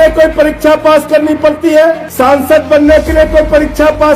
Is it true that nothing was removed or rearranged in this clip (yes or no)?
no